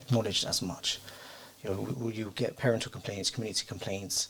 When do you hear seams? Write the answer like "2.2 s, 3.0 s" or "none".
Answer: none